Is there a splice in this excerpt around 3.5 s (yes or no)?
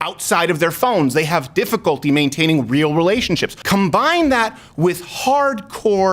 yes